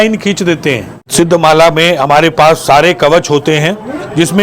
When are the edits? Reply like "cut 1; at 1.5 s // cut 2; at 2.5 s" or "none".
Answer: cut 1; at 1.0 s